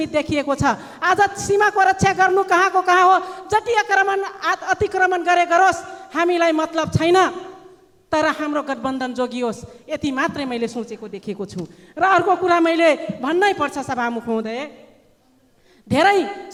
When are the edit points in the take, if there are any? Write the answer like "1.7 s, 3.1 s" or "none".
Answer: none